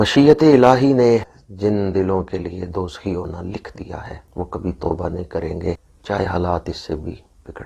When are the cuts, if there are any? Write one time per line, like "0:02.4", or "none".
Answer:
0:01.4
0:04.2
0:05.9